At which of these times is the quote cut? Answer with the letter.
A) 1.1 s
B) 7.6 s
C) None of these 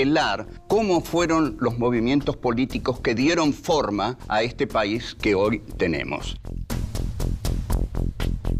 B